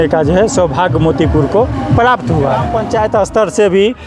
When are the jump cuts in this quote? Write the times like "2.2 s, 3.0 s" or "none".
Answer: 2.8 s